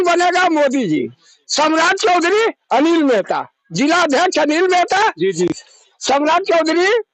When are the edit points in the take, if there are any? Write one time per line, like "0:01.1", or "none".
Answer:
none